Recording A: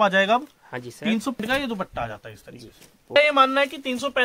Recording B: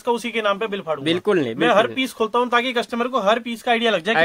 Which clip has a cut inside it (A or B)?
A